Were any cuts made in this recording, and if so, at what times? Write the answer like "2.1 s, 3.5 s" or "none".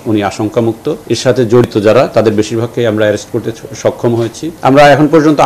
1.0 s, 4.5 s